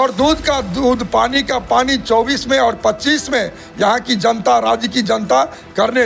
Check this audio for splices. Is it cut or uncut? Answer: uncut